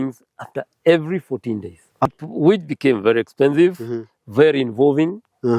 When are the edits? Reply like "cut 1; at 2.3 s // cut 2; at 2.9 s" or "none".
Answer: cut 1; at 2.1 s

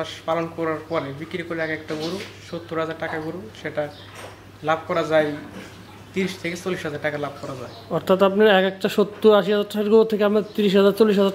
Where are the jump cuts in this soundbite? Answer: none

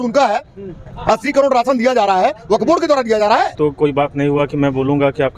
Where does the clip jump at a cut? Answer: cut 1; at 3.5 s

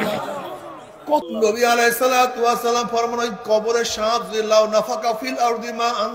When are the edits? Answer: cut 1; at 1.2 s

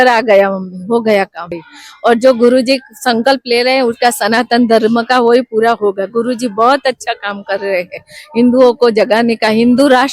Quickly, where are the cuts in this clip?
cut 1; at 1.6 s

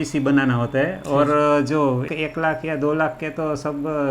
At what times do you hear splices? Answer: cut 1; at 2.1 s

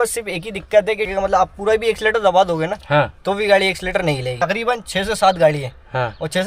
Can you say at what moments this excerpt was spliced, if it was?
cut 1; at 1.1 s // cut 2; at 4.3 s

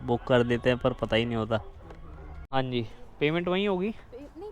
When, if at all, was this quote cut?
cut 1; at 2.4 s

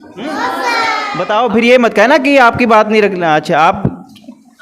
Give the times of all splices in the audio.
cut 1; at 1.1 s

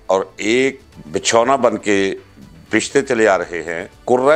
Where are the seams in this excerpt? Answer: cut 1; at 0.9 s

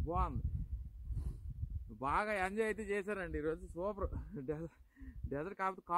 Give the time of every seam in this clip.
none

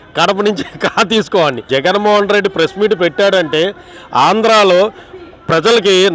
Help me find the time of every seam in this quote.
cut 1; at 1.7 s

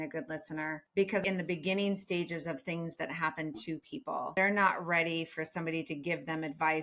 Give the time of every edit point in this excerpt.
cut 1; at 1.1 s // cut 2; at 4.3 s

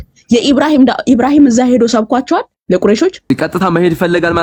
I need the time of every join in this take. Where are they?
none

